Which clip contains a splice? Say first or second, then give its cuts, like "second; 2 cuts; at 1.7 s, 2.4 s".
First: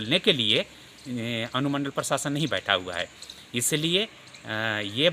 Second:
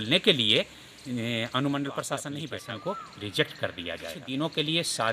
second; 2 cuts; at 2.5 s, 4.2 s